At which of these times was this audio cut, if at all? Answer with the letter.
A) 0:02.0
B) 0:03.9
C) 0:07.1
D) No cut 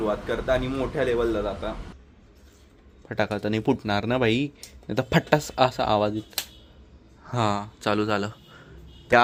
D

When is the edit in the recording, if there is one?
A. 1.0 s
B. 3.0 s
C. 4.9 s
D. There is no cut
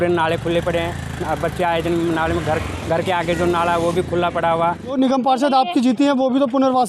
C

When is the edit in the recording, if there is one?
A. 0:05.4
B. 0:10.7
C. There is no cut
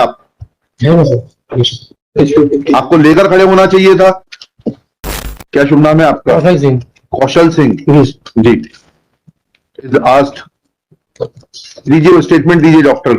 A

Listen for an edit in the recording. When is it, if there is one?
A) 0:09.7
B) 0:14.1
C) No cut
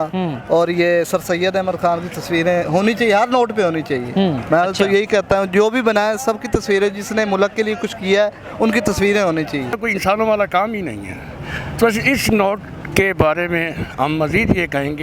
A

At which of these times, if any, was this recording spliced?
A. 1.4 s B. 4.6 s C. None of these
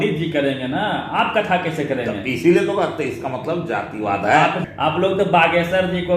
B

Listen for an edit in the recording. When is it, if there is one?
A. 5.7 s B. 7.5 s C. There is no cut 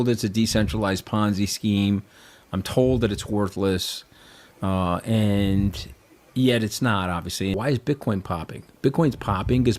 B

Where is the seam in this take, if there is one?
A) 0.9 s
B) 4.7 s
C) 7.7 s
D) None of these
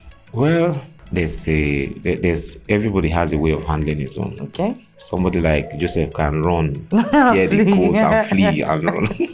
A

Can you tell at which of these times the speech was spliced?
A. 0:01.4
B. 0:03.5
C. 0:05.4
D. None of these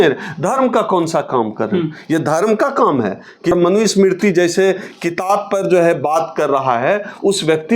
B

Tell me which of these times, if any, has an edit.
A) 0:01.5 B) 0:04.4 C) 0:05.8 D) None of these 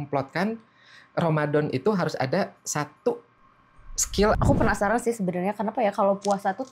B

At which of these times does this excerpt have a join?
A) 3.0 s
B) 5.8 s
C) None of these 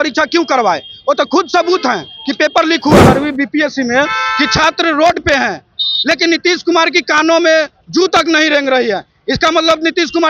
A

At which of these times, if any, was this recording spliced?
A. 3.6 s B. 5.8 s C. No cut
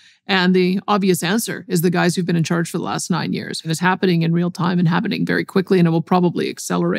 A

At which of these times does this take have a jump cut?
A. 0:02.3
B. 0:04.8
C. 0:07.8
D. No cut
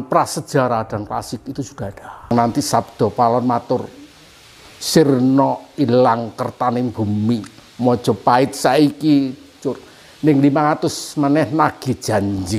A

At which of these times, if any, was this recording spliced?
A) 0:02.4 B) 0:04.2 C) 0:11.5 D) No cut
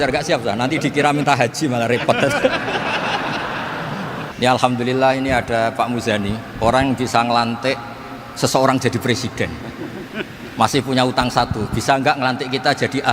B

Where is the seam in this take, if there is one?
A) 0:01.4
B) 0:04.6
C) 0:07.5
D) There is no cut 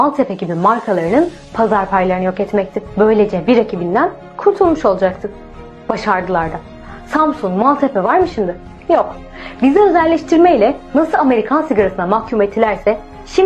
C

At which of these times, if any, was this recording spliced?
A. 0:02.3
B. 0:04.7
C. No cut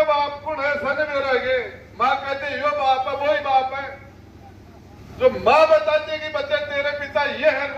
C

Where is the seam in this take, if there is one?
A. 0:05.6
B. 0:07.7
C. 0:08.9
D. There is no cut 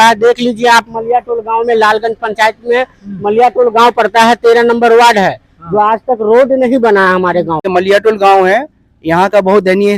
B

